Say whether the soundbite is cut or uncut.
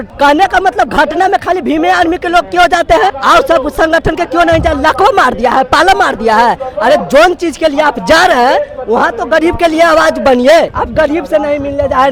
uncut